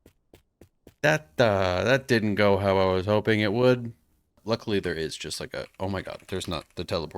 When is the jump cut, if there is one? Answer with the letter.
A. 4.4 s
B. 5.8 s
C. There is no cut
A